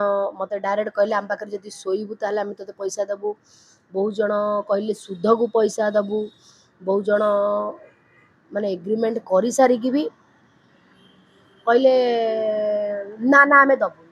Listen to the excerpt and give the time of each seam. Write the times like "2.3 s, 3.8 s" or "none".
none